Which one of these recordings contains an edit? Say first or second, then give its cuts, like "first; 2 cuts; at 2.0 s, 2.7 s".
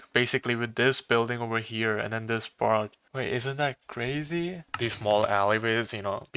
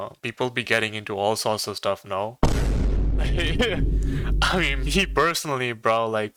first; 1 cut; at 4.7 s